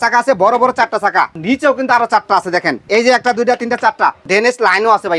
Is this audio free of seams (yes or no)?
no